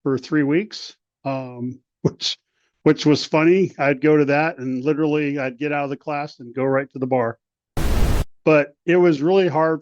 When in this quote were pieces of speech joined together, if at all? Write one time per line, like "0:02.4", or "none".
0:08.1